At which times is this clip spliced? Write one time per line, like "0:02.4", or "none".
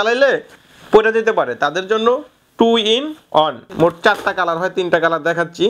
0:03.7